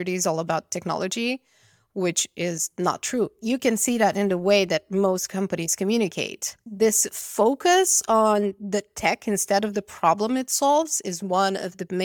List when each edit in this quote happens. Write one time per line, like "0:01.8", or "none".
0:03.3
0:06.5